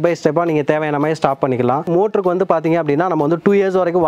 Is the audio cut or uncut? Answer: cut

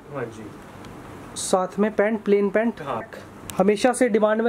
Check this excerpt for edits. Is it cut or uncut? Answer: cut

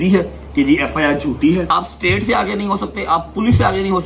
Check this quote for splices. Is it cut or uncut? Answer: cut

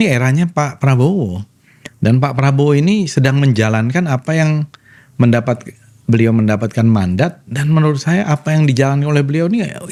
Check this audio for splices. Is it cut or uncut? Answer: uncut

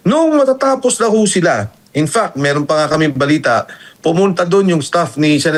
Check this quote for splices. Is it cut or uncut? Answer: uncut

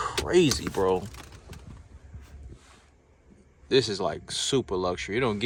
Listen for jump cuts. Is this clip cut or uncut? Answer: uncut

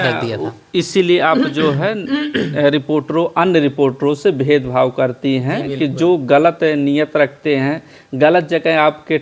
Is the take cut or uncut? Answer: uncut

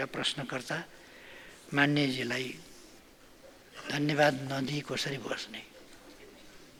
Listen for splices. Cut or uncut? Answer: uncut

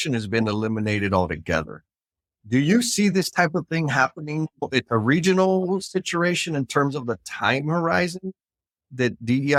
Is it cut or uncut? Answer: uncut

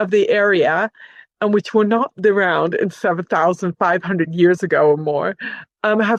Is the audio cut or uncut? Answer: uncut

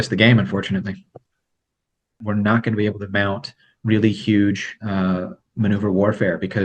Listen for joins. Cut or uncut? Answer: cut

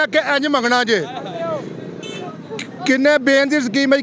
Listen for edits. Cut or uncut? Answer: uncut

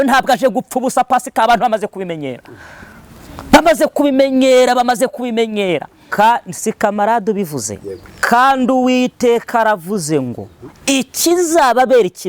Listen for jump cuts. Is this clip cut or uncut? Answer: cut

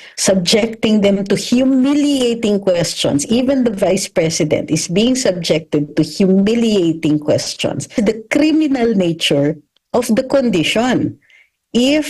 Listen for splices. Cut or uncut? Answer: cut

